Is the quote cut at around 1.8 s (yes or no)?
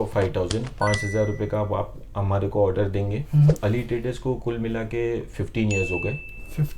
no